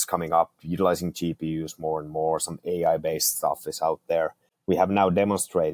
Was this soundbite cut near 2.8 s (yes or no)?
no